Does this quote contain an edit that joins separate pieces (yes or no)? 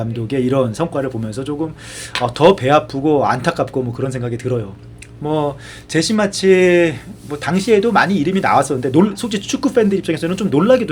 no